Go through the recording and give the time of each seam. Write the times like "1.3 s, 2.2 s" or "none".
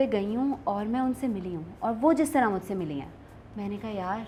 none